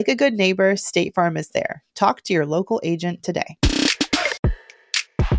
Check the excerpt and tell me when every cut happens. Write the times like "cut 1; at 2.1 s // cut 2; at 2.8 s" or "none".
cut 1; at 4.5 s